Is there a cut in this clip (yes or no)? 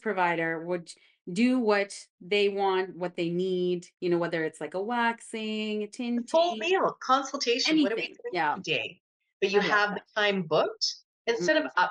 no